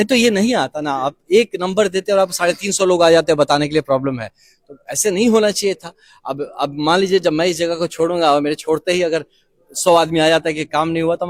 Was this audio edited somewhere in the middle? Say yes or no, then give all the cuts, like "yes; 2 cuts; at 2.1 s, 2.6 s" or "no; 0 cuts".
no; 0 cuts